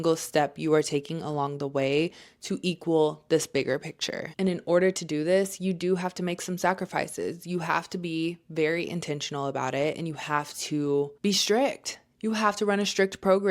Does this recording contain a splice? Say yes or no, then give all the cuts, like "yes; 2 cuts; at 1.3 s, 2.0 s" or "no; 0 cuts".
yes; 1 cut; at 11.1 s